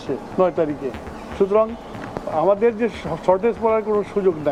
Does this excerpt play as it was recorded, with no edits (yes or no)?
yes